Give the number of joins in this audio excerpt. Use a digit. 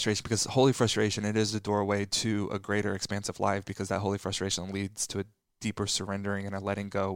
0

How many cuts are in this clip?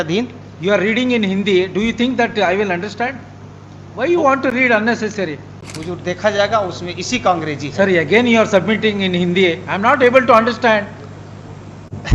1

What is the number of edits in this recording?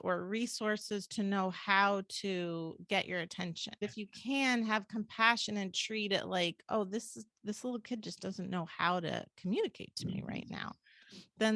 1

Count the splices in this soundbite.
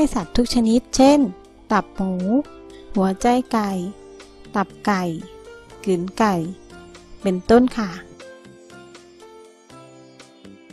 1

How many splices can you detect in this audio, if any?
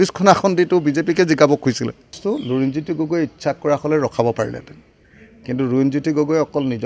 1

